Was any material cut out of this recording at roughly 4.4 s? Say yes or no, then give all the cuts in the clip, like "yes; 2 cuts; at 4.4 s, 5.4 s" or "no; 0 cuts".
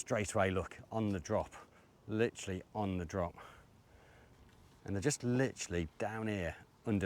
yes; 1 cut; at 4.4 s